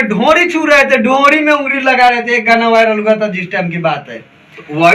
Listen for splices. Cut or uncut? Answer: uncut